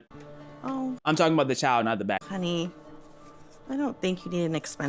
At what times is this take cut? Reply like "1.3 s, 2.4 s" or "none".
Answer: none